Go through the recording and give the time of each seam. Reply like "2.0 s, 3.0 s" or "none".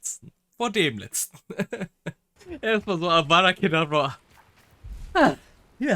2.3 s